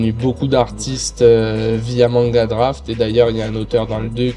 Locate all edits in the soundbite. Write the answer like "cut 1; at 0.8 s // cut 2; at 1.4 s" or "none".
none